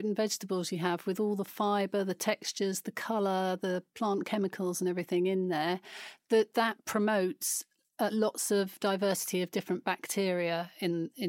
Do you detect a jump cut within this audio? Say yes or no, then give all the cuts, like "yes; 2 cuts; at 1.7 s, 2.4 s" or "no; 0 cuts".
no; 0 cuts